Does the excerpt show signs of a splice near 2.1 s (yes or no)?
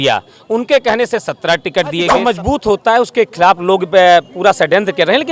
yes